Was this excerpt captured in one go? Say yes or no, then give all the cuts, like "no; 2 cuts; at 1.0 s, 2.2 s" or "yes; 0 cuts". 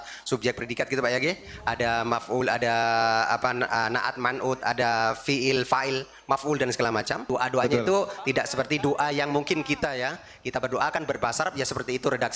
no; 2 cuts; at 7.2 s, 8.2 s